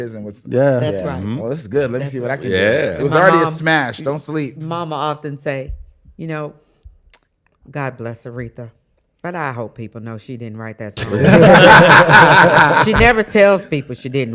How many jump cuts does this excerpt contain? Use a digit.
0